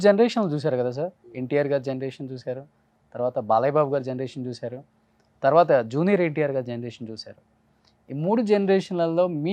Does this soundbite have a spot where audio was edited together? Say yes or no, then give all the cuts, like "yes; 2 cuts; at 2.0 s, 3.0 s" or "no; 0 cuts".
no; 0 cuts